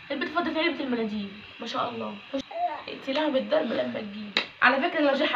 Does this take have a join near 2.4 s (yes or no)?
yes